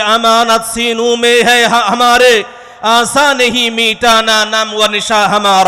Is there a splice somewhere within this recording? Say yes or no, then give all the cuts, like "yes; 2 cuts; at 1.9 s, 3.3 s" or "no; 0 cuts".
no; 0 cuts